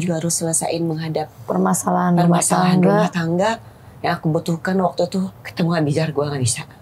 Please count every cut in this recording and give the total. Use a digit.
2